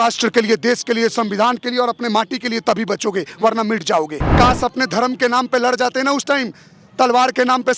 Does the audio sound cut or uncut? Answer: cut